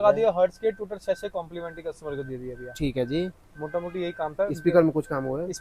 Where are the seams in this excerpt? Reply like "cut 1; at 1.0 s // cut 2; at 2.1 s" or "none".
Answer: none